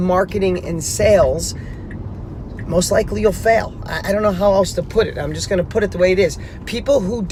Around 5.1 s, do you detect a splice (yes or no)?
no